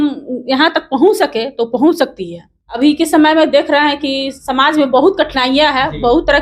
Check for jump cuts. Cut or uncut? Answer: cut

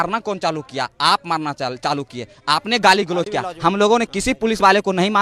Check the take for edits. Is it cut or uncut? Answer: uncut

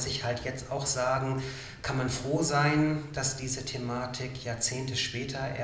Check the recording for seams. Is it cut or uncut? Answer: uncut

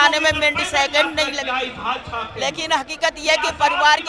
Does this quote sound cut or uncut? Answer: uncut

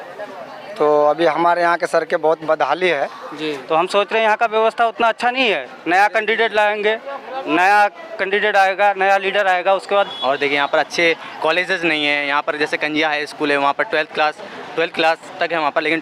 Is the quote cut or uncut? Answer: cut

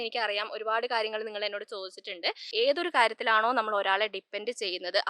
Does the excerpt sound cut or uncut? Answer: cut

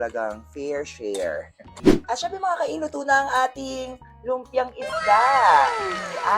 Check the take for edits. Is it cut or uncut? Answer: cut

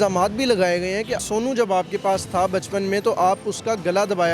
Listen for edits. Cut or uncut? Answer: cut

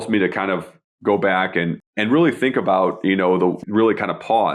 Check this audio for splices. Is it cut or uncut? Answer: cut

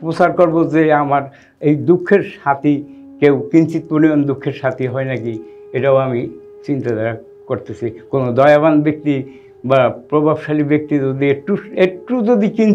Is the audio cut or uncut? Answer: uncut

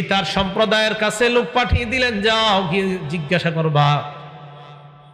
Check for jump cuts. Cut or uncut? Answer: uncut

